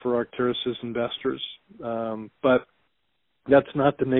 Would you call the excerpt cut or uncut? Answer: uncut